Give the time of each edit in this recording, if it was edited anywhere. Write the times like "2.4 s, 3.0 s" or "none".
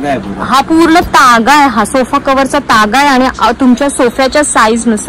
none

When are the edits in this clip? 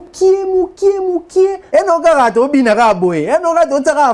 1.6 s

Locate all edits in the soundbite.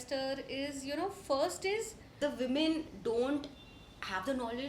2.1 s

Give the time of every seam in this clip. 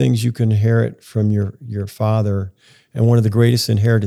none

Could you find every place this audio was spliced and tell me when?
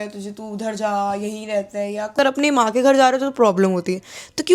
2.2 s

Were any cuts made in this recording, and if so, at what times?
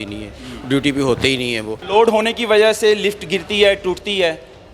1.7 s

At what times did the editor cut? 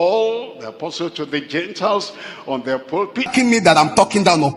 3.3 s

